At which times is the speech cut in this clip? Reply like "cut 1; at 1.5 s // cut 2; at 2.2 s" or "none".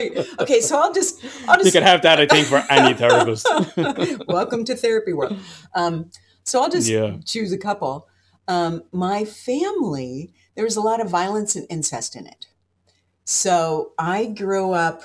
none